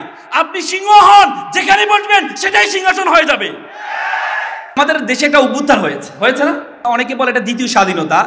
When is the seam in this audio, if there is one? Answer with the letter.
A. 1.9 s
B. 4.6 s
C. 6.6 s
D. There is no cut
B